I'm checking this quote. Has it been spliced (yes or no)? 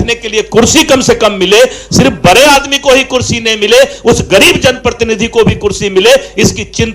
no